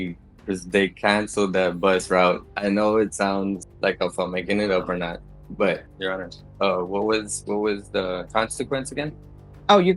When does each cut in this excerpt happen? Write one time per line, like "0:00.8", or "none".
0:02.5
0:05.9